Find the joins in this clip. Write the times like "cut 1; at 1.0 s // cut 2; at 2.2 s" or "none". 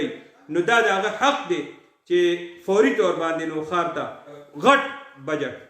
cut 1; at 4.4 s